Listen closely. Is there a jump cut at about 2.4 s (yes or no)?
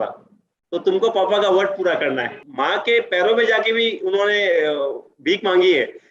yes